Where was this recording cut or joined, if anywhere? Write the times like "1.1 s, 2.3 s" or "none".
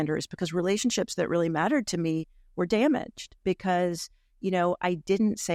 none